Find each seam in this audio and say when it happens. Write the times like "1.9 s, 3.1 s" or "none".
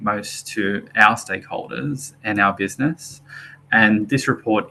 none